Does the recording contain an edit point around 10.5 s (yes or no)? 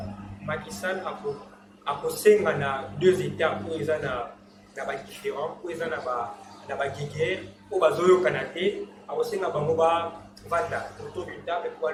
no